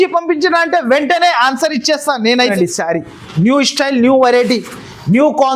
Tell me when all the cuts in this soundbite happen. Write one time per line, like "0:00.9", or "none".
0:02.5